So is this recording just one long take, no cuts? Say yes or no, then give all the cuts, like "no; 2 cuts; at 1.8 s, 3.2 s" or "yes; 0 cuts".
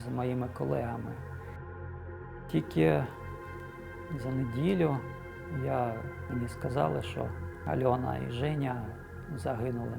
no; 4 cuts; at 1.2 s, 2.4 s, 6.1 s, 7.5 s